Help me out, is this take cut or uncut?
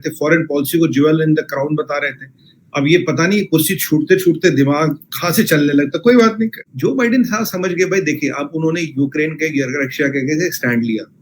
cut